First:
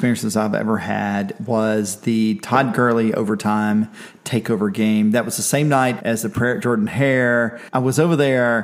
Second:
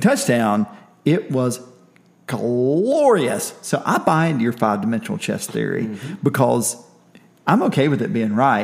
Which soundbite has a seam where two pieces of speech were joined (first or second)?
first